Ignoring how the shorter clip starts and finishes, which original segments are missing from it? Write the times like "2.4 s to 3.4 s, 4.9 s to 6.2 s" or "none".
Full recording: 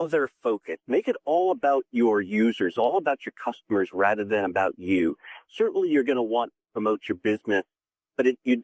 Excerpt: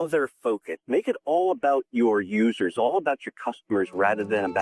none